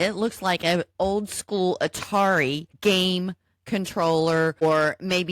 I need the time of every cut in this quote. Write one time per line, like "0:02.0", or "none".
0:02.7
0:04.6